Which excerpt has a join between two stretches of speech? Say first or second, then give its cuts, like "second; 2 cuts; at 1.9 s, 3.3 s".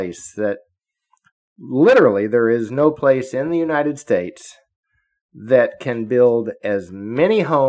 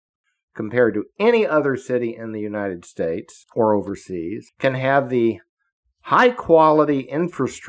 second; 2 cuts; at 3.4 s, 4.5 s